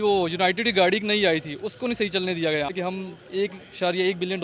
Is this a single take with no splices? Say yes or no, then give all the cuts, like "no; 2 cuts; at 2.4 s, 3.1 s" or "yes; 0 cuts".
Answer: no; 1 cut; at 2.7 s